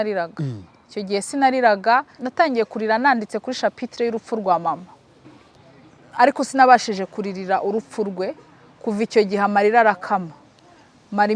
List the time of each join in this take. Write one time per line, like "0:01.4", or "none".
0:02.2
0:05.5